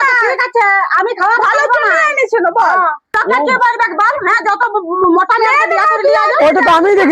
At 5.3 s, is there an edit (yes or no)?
no